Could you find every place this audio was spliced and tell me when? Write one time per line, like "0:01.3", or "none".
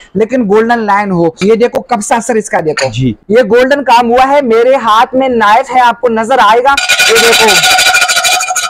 0:01.4
0:03.2